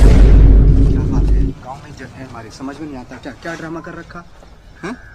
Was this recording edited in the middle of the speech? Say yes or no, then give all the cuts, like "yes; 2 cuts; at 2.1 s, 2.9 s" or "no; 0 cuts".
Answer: yes; 2 cuts; at 0.9 s, 1.6 s